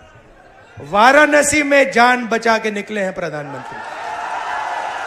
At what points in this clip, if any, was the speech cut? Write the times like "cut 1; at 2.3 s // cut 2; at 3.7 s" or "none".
none